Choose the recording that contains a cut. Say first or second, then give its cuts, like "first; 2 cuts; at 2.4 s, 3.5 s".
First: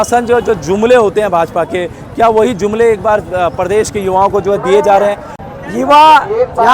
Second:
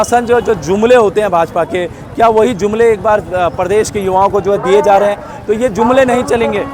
first; 1 cut; at 5.4 s